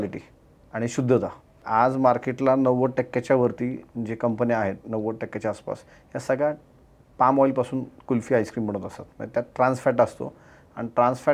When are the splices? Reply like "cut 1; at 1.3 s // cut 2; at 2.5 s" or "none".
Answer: cut 1; at 1.6 s